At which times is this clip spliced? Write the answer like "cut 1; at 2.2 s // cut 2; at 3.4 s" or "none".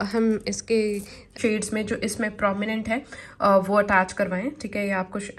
cut 1; at 1.4 s